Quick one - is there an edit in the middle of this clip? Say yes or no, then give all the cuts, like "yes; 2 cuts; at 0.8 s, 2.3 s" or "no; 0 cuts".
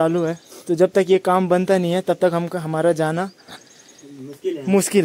no; 0 cuts